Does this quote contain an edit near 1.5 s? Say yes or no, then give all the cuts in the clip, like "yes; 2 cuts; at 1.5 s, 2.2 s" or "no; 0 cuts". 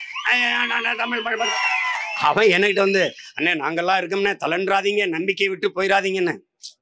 yes; 1 cut; at 1.5 s